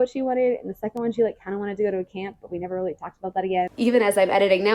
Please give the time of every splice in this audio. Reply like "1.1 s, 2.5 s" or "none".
3.7 s